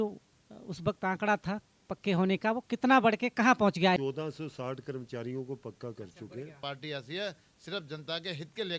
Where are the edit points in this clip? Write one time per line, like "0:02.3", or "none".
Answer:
0:04.0
0:06.6

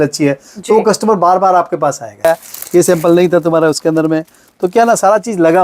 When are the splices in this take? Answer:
0:02.2

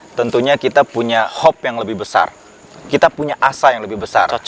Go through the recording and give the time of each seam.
0:01.3

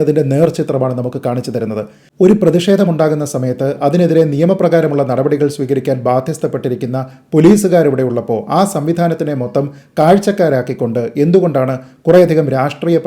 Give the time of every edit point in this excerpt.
0:02.0

